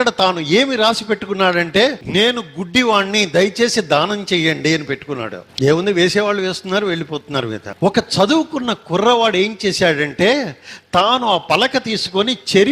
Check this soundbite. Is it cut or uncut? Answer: cut